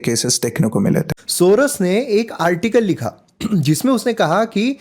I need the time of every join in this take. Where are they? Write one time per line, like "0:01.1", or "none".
0:01.2

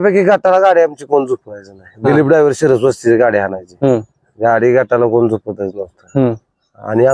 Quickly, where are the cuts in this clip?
none

